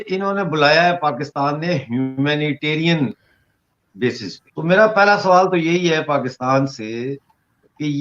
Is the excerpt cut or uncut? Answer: cut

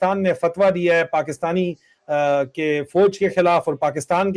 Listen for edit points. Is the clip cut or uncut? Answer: uncut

